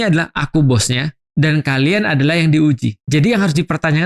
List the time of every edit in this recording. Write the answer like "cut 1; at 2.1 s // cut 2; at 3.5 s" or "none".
cut 1; at 1.2 s // cut 2; at 3.0 s